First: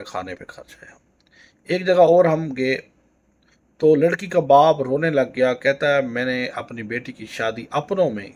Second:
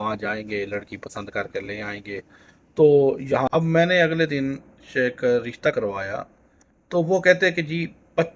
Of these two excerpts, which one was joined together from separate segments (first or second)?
second